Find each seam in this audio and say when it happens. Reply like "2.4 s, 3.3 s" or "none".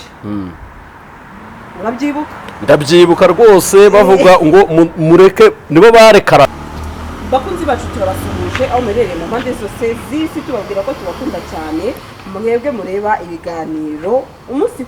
6.5 s